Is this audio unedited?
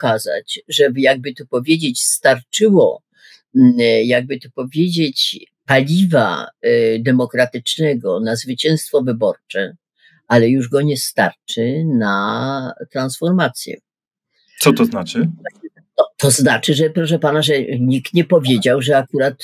yes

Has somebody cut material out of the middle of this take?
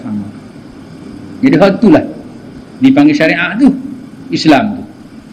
no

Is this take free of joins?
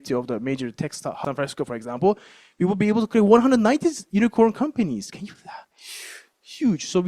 no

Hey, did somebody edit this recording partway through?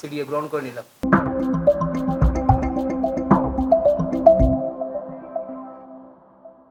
no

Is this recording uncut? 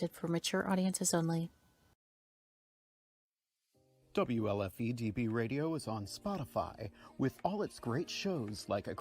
no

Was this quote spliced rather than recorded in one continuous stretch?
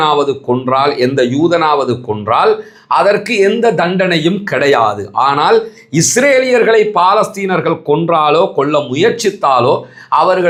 no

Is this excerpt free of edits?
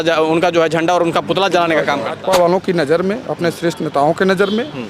no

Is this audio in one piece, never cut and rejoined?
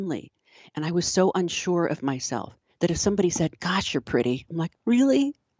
yes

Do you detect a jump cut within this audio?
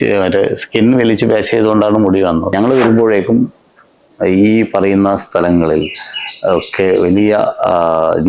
yes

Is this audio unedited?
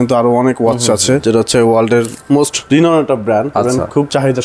no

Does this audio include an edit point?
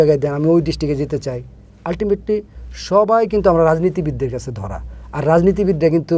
no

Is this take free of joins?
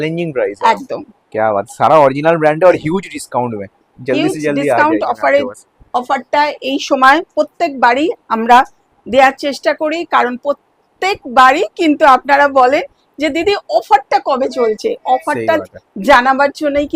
yes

